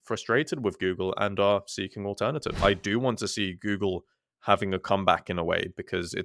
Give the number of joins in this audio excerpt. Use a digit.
1